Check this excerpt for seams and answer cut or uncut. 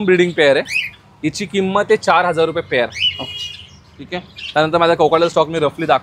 uncut